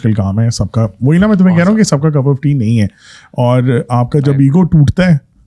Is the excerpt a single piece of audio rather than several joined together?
yes; 0 cuts

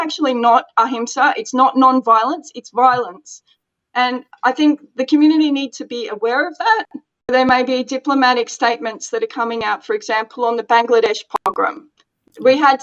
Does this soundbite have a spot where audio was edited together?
yes; 1 cut; at 7.3 s

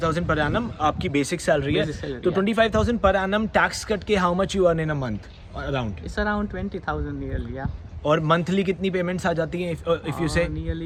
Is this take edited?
no; 0 cuts

